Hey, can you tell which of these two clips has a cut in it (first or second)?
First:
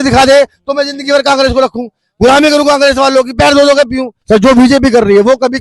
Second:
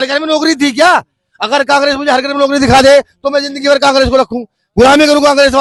first